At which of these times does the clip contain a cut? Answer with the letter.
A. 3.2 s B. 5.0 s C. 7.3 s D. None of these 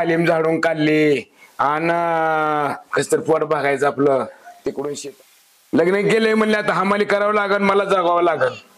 B